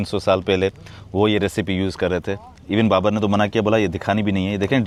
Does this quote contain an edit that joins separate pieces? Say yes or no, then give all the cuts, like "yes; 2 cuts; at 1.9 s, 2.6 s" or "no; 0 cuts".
no; 0 cuts